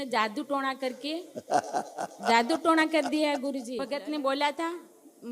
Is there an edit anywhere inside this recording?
yes; 1 cut; at 3.7 s

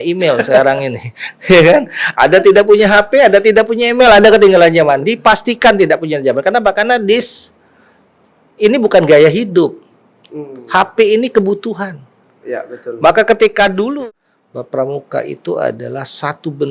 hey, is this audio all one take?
no; 1 cut; at 13.9 s

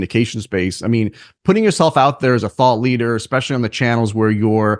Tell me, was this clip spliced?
no; 0 cuts

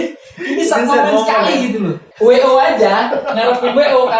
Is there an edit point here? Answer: yes; 1 cut; at 2.0 s

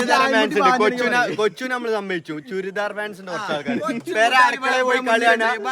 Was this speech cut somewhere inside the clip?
no; 0 cuts

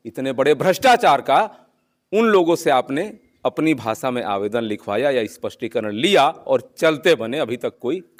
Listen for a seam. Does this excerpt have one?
no; 0 cuts

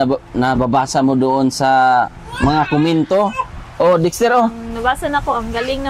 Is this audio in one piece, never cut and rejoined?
yes; 0 cuts

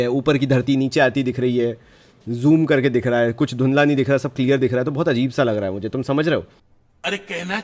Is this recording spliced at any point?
no; 0 cuts

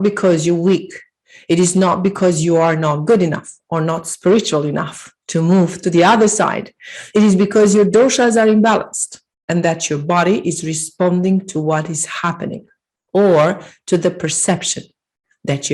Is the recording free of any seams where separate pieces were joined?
yes; 0 cuts

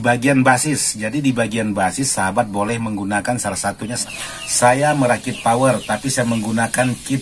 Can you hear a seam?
yes; 1 cut; at 4.0 s

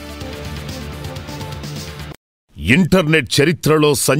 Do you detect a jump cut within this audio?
yes; 1 cut; at 2.5 s

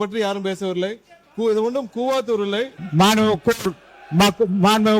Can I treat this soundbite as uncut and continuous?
no; 1 cut; at 2.8 s

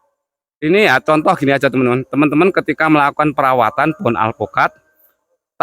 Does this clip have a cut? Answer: no; 0 cuts

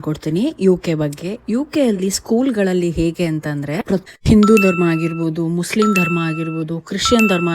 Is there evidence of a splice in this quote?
yes; 1 cut; at 4.1 s

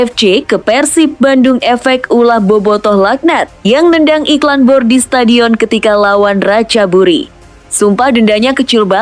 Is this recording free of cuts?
yes; 0 cuts

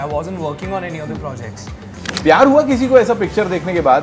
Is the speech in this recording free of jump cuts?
no; 1 cut; at 2.1 s

